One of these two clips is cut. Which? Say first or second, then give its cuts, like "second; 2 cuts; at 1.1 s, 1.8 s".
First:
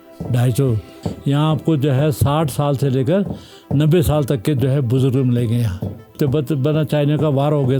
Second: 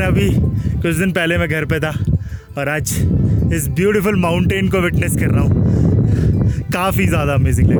first; 2 cuts; at 0.9 s, 6.1 s